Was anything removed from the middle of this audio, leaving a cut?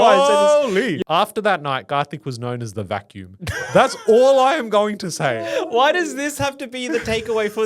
yes; 1 cut; at 1.0 s

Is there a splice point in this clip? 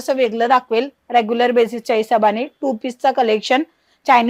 no; 0 cuts

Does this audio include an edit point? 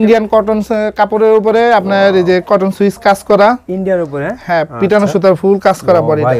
no; 0 cuts

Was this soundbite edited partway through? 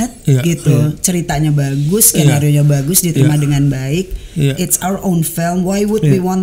no; 0 cuts

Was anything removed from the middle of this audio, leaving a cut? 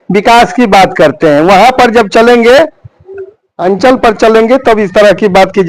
no; 0 cuts

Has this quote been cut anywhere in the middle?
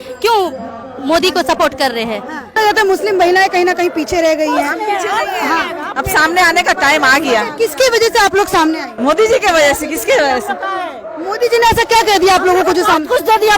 yes; 2 cuts; at 2.5 s, 8.9 s

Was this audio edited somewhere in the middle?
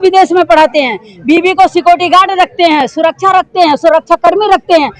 no; 0 cuts

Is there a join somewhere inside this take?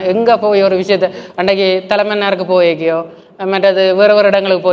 no; 0 cuts

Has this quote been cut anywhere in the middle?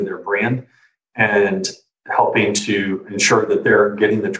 yes; 1 cut; at 3.1 s

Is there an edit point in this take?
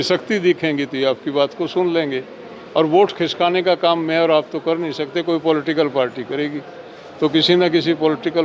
no; 0 cuts

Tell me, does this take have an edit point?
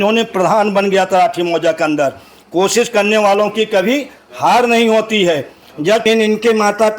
yes; 1 cut; at 6.0 s

